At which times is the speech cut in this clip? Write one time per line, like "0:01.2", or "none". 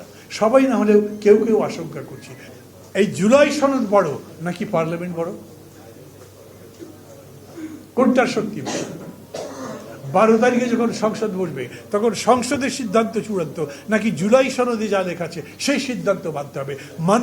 0:02.5